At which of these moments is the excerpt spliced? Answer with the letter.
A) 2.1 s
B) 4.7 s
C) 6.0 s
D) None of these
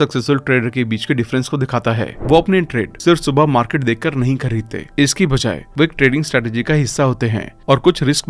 A